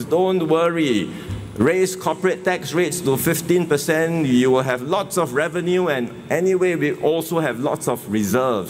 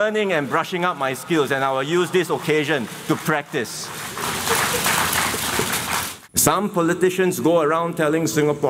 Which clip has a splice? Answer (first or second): second